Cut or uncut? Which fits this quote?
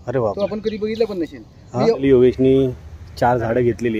cut